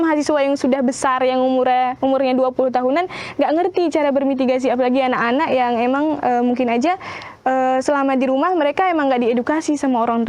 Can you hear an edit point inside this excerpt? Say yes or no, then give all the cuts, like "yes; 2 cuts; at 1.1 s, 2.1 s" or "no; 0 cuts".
no; 0 cuts